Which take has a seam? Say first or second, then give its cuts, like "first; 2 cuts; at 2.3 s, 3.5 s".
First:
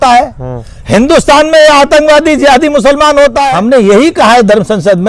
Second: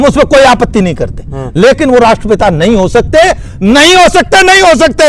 first; 1 cut; at 3.5 s